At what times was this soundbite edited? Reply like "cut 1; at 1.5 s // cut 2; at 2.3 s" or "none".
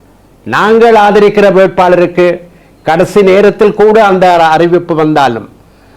none